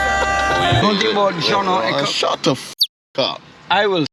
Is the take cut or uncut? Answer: uncut